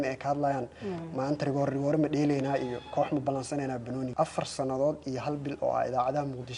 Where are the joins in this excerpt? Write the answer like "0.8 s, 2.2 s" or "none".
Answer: 4.1 s

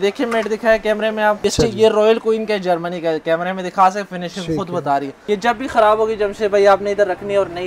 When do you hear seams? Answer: 1.4 s, 5.2 s

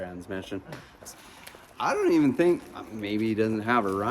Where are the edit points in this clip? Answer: 1.0 s

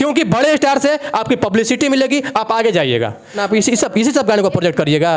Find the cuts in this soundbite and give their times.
3.4 s

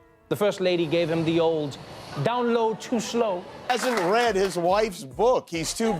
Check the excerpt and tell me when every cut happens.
3.5 s

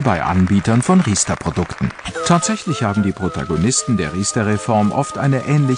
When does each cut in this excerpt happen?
2.1 s

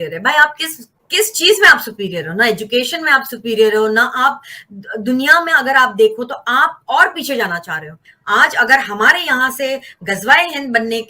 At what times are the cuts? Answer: 8.0 s

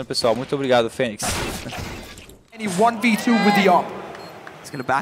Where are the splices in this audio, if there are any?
2.7 s

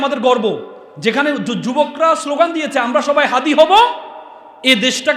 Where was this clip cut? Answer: none

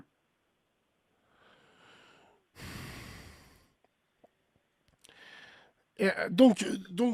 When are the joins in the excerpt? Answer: none

